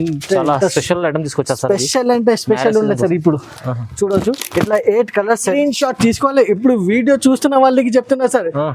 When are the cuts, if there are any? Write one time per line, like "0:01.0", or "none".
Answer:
0:05.5